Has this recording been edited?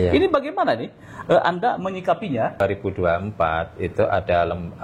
no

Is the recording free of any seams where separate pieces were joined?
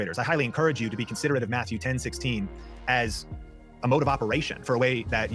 yes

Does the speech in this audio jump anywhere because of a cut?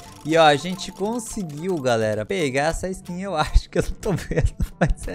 yes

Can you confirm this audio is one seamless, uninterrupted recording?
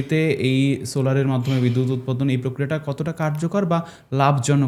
yes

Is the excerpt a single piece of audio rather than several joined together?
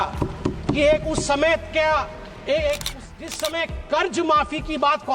no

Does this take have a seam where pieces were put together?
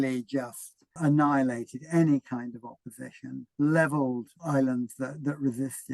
yes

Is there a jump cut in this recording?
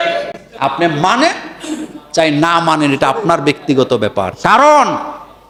no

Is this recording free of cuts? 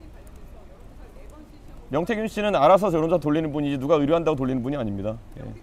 yes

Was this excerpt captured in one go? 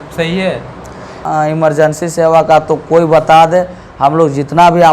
no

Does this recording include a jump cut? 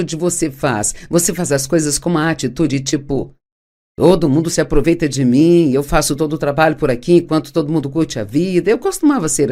no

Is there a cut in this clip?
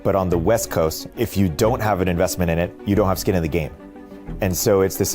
yes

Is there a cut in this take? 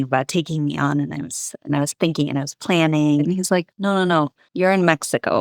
yes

